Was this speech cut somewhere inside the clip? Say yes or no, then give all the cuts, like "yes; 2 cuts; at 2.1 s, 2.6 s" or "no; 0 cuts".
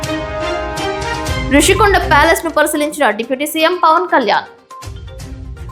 no; 0 cuts